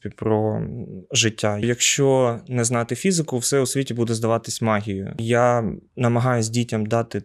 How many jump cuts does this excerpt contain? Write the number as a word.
two